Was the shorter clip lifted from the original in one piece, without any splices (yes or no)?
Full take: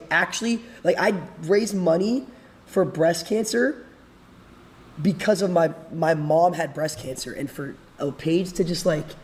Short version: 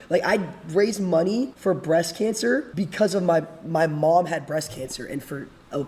no